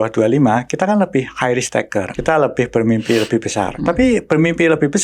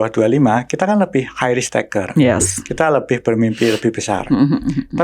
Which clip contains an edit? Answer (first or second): first